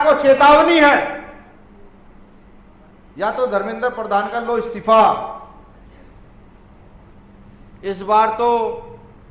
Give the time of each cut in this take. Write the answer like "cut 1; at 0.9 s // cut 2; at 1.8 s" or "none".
none

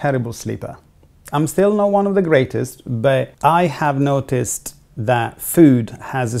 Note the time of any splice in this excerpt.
cut 1; at 3.3 s

